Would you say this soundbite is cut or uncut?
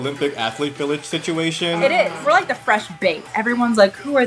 cut